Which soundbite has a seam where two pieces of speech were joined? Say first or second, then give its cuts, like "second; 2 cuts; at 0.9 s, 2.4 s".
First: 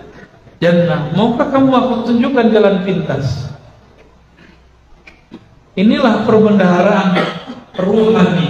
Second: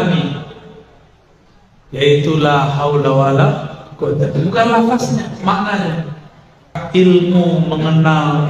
second; 1 cut; at 6.8 s